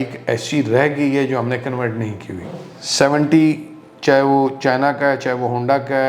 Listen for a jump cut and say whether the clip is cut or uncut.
cut